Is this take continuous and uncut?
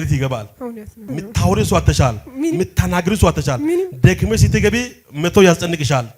no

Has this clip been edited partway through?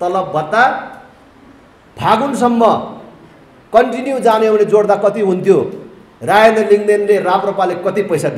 no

